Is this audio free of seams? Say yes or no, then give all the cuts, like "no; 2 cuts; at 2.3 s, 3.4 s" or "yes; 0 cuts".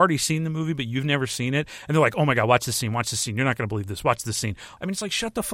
no; 1 cut; at 4.6 s